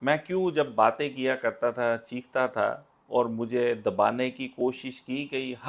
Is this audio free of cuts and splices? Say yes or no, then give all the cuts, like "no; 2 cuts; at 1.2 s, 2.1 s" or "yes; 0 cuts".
yes; 0 cuts